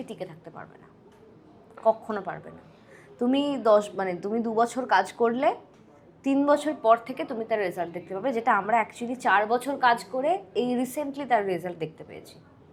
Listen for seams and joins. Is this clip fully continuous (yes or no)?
yes